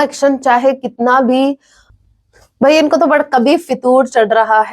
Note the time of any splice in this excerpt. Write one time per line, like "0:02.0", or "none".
0:01.8